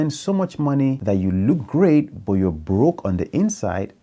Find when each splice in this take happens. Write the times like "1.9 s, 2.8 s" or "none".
1.0 s